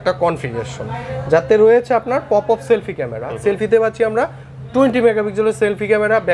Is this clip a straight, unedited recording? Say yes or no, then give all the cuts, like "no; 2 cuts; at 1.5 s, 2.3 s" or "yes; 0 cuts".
yes; 0 cuts